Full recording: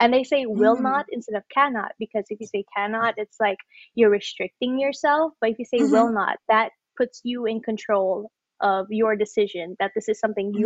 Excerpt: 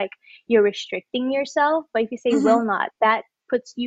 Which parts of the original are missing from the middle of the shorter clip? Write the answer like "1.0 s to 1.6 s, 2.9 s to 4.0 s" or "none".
none